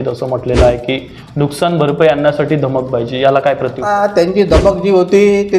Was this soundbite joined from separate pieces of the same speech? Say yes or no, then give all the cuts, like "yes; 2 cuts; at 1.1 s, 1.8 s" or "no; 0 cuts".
yes; 1 cut; at 3.8 s